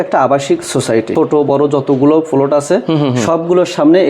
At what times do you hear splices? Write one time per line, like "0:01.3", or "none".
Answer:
0:01.1